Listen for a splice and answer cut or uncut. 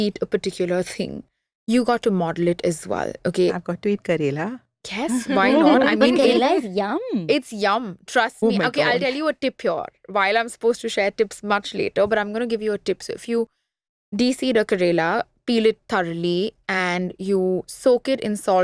uncut